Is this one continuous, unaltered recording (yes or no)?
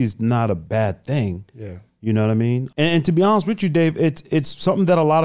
no